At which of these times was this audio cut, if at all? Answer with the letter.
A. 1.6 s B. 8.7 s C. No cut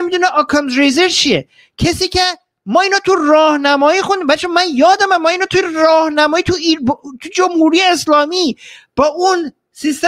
C